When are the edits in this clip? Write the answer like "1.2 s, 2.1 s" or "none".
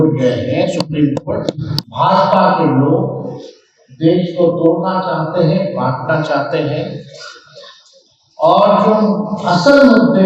1.7 s